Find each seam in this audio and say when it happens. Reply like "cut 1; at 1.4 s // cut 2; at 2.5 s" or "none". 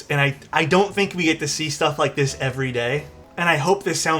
cut 1; at 3.2 s